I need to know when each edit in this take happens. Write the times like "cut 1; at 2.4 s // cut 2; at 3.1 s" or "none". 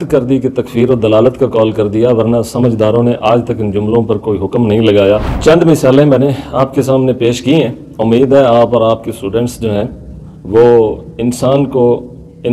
cut 1; at 5.3 s